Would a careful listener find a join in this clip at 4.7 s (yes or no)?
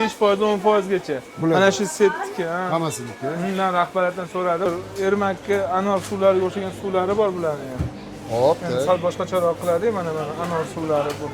yes